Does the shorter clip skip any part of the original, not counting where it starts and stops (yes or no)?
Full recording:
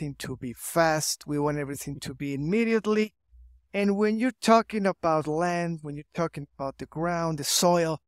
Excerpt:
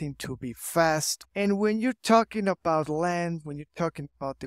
yes